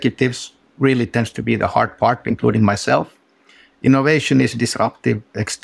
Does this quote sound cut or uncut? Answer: uncut